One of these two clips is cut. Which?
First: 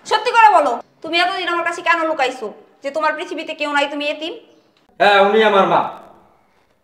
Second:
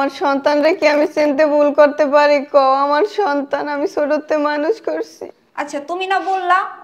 first; 1 cut; at 0.9 s

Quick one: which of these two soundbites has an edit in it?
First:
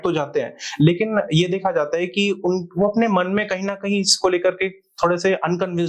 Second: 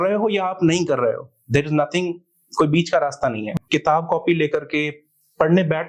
second; 1 cut; at 3.5 s

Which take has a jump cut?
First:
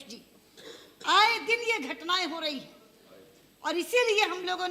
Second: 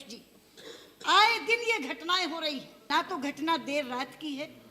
second; 1 cut; at 2.9 s

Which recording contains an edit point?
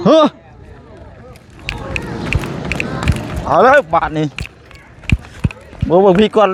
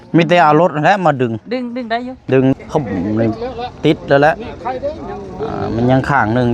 second; 1 cut; at 2.5 s

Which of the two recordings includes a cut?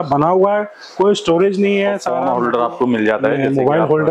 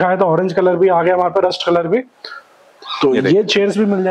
first; 1 cut; at 2.1 s

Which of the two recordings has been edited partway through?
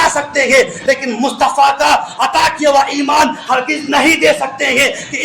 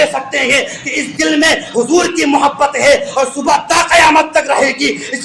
first; 1 cut; at 2.4 s

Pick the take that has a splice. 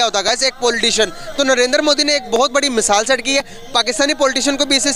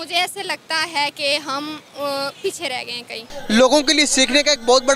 second; 1 cut; at 3.3 s

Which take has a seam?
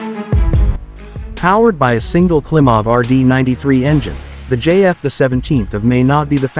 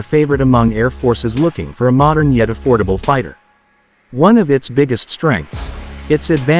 first; 1 cut; at 1.0 s

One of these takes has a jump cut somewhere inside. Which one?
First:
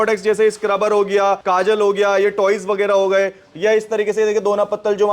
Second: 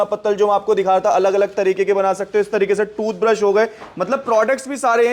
first; 1 cut; at 1.4 s

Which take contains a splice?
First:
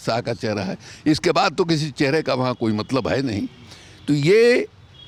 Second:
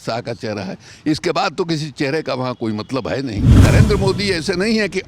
second; 1 cut; at 3.5 s

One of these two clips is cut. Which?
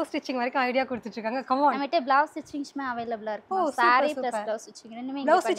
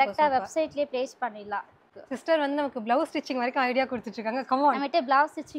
second; 1 cut; at 1.8 s

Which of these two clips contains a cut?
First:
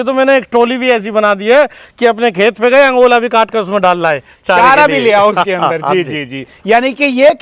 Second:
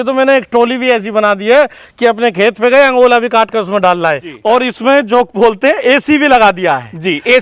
second; 1 cut; at 4.3 s

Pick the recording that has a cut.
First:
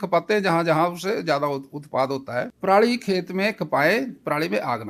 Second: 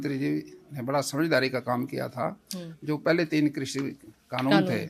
first; 1 cut; at 2.5 s

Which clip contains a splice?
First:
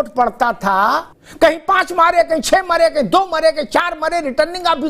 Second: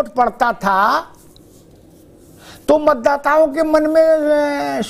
first; 1 cut; at 1.2 s

